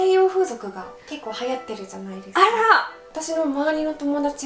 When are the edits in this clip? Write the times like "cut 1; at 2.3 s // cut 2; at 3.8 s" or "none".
cut 1; at 3.1 s